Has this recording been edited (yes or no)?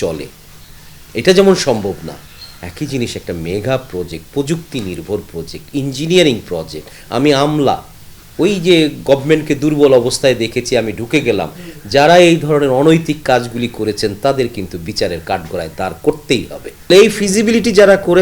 yes